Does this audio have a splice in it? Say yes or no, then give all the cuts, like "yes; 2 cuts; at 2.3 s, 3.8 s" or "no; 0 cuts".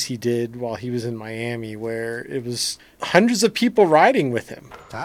yes; 1 cut; at 2.9 s